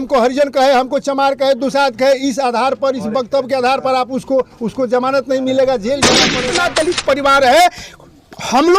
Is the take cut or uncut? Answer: cut